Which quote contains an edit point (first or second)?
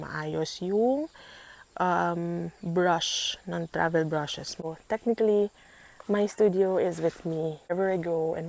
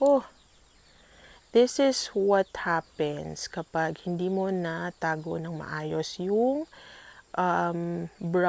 first